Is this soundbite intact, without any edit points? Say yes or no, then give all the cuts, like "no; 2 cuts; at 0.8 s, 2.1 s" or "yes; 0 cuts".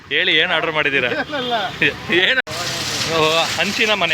no; 1 cut; at 2.4 s